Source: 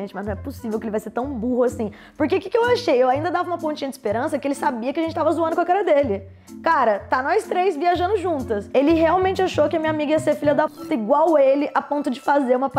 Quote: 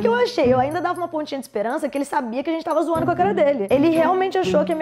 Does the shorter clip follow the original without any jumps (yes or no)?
no